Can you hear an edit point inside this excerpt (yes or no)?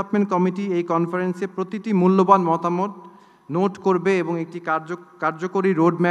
no